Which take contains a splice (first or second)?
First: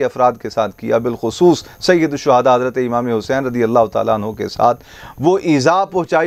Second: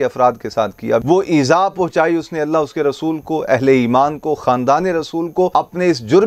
second